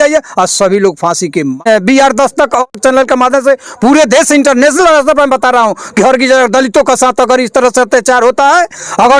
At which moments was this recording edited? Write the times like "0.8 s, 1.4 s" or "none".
1.6 s, 2.7 s